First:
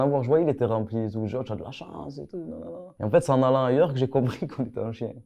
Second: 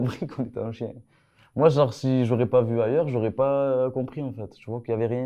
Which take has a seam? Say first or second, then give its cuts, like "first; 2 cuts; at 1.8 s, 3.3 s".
first; 1 cut; at 2.9 s